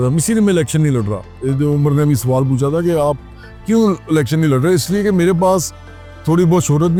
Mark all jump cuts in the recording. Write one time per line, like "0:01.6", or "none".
none